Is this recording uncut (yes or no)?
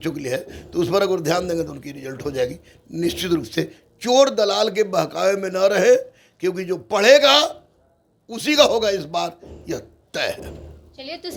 yes